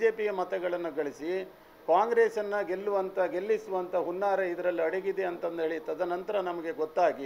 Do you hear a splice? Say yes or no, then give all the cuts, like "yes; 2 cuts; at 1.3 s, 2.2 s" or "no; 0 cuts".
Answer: no; 0 cuts